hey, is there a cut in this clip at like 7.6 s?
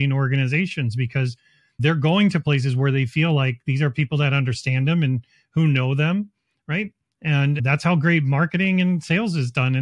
yes; 1 cut; at 7.6 s

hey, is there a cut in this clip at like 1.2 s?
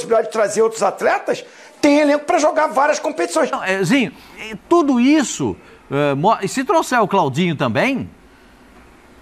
no; 1 cut; at 3.6 s

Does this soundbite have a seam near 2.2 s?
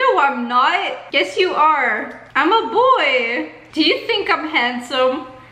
no; 1 cut; at 3.6 s

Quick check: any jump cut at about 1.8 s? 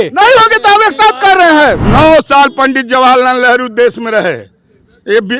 yes; 1 cut; at 1.8 s

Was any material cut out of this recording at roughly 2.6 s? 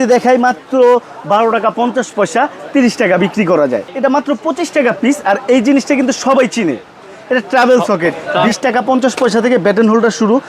no; 2 cuts; at 3.9 s, 8.3 s

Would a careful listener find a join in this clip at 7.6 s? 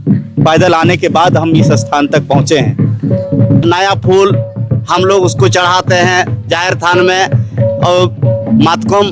no; 1 cut; at 3.6 s

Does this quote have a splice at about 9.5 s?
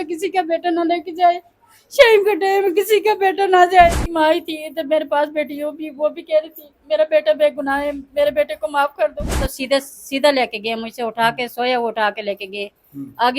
yes; 2 cuts; at 4.0 s, 9.5 s

